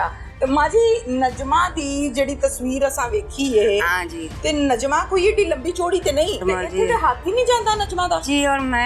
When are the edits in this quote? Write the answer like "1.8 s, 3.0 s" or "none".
6.4 s